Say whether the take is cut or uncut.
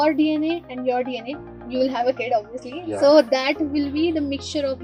uncut